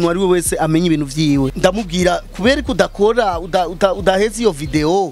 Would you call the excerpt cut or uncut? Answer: cut